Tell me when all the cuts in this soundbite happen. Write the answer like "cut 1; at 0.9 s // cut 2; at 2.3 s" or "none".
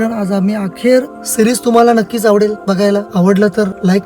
cut 1; at 1.2 s // cut 2; at 3.1 s